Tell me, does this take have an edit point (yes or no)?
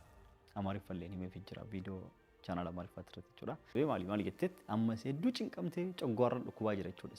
yes